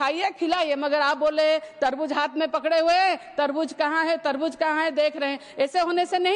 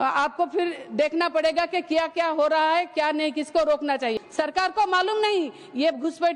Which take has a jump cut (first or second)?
second